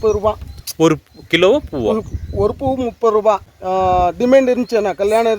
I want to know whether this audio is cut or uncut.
cut